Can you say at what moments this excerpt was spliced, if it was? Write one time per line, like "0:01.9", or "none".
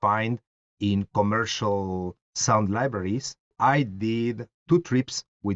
0:03.5
0:04.5